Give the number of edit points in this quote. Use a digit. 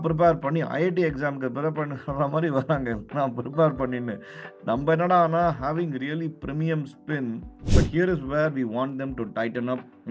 1